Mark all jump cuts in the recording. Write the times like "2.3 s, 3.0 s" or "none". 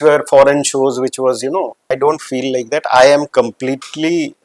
1.8 s